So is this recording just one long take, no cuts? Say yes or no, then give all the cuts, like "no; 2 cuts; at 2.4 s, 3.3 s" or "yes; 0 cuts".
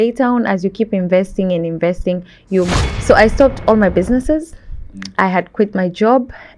no; 1 cut; at 2.7 s